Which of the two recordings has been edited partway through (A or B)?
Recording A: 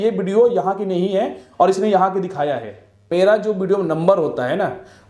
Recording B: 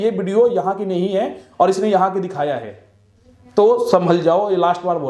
A